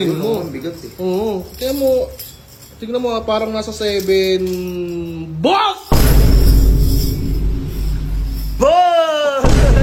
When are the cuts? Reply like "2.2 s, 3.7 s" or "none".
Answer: none